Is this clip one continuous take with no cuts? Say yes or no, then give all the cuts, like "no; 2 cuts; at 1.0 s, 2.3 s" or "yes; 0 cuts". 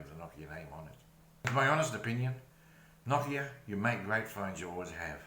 no; 1 cut; at 1.4 s